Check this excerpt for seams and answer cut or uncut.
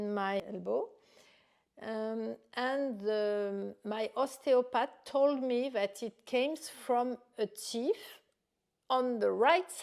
uncut